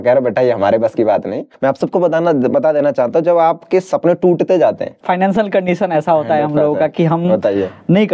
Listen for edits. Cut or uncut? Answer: cut